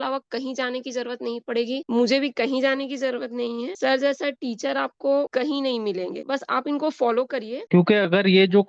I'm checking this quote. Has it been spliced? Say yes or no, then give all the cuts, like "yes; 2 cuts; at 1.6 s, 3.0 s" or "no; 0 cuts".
yes; 1 cut; at 7.6 s